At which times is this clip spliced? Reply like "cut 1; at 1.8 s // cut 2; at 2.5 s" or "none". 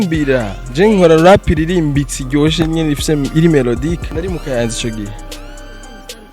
cut 1; at 4.1 s

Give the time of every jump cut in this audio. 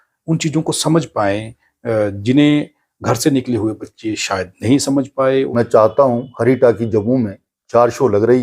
cut 1; at 5.5 s

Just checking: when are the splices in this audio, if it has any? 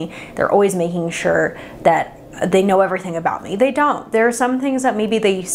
none

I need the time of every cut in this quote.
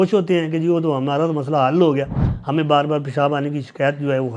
cut 1; at 2.2 s

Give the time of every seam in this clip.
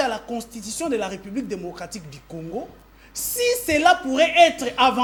none

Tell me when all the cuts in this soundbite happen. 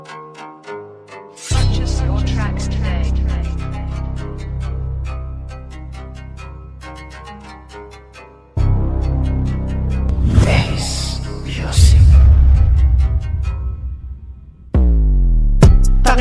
cut 1; at 1.3 s

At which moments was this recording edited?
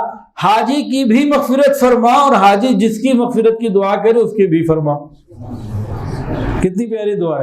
none

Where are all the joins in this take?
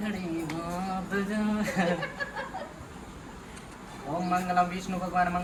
none

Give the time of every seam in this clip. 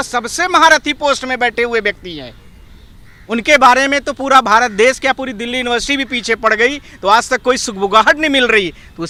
none

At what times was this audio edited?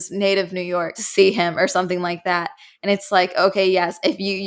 cut 1; at 1.0 s

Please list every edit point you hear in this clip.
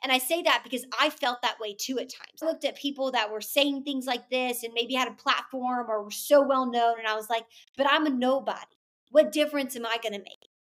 cut 1; at 2.4 s

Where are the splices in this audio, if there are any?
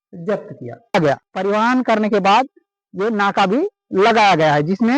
cut 1; at 0.9 s

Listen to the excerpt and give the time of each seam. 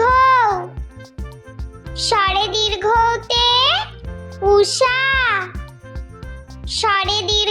cut 1; at 0.7 s // cut 2; at 2.1 s

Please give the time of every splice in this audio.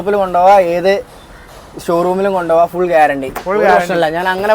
none

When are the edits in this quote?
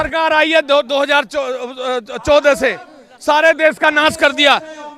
none

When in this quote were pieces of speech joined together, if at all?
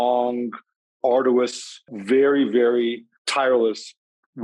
cut 1; at 1.9 s // cut 2; at 3.1 s

